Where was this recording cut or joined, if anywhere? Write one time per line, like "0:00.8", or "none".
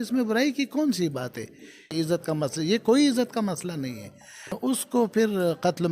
0:01.9
0:04.6